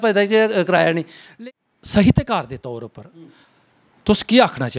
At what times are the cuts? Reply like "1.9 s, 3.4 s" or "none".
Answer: 1.2 s